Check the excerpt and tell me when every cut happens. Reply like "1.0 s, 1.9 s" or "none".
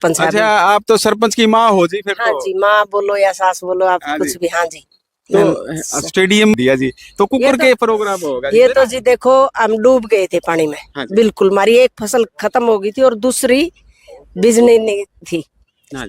6.5 s